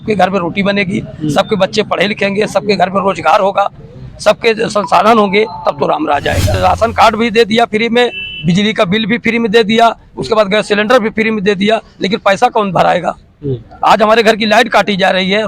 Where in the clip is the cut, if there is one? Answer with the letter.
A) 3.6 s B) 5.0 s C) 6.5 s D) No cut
C